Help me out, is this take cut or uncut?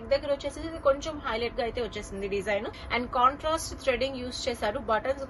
cut